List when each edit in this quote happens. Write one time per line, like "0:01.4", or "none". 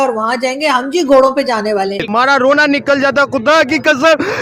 0:02.0